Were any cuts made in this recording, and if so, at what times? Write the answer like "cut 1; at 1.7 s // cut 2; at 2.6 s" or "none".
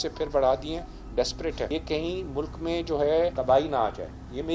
cut 1; at 1.7 s // cut 2; at 3.3 s